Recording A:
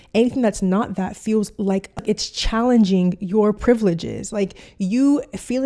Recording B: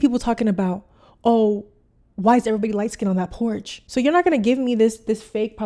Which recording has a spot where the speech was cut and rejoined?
B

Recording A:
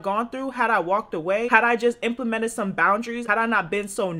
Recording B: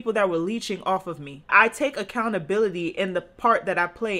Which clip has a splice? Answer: B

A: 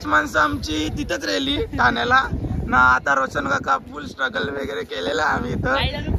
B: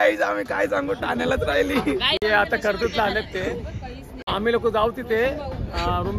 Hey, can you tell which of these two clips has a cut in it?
B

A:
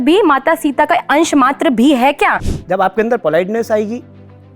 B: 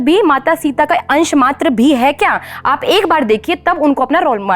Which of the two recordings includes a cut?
A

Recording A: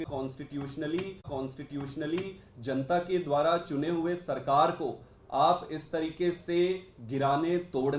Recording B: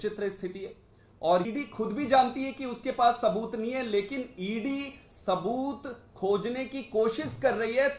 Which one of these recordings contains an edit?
B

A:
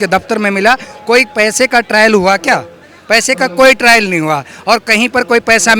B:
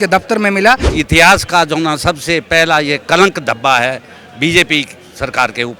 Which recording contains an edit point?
B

